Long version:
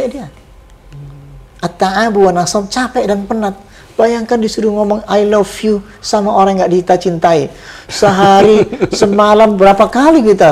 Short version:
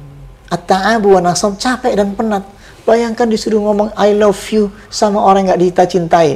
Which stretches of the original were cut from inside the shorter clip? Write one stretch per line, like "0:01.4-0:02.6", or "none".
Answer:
none

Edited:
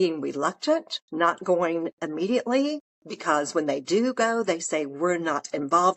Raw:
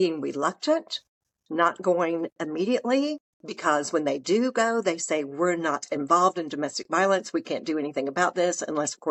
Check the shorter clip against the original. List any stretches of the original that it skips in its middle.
0:01.0-0:01.4

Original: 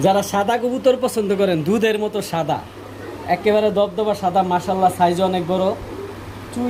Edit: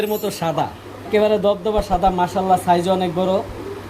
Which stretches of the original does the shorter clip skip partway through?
0:03.0-0:03.4

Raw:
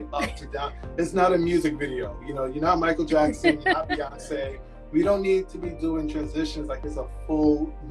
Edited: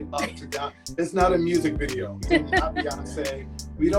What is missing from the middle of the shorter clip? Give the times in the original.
0:02.2-0:03.4

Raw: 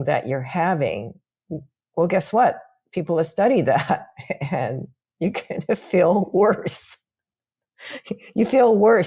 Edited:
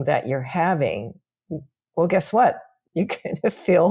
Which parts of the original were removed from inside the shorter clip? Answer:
0:02.7-0:05.0

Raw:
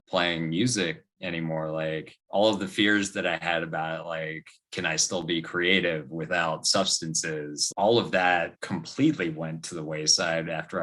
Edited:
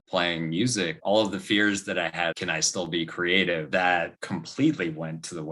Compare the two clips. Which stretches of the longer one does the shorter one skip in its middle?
0:01.0-0:02.2
0:03.6-0:04.7
0:06.0-0:08.1

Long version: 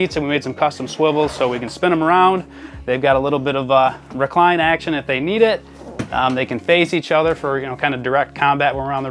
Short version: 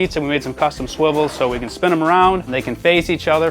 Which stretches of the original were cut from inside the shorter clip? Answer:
0:02.6-0:06.4

